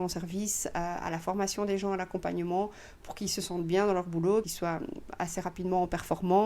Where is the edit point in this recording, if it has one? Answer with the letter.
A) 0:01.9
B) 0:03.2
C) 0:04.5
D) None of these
C